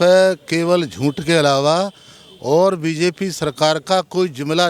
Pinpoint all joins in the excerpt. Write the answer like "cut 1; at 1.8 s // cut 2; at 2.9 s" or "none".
none